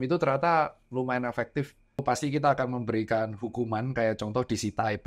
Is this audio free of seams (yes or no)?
no